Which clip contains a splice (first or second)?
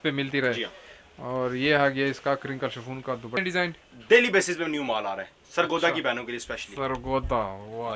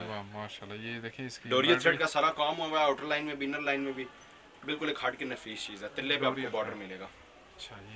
first